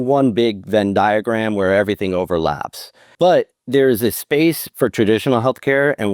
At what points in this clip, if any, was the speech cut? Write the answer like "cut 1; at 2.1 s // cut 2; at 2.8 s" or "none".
cut 1; at 3.0 s